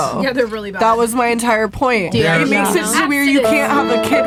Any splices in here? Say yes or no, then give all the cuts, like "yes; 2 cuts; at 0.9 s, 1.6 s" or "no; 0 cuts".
no; 0 cuts